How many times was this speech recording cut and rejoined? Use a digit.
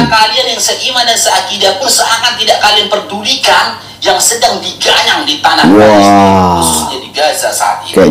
0